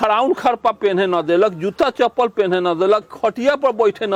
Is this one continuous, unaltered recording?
yes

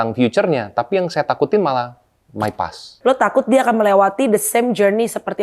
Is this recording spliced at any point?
yes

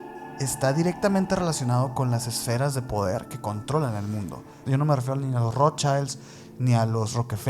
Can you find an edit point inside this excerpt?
yes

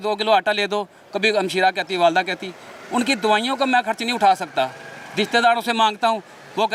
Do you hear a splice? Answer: no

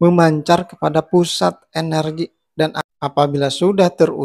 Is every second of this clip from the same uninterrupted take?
no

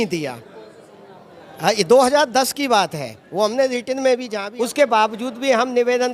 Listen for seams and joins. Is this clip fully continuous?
no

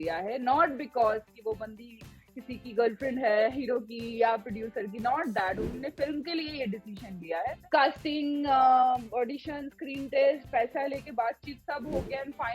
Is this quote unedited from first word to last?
no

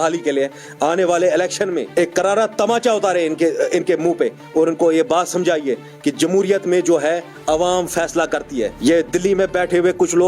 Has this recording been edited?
yes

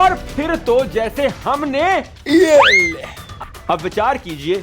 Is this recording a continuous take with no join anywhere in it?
no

